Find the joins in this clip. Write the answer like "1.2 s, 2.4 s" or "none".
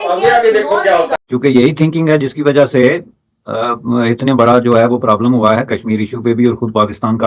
1.2 s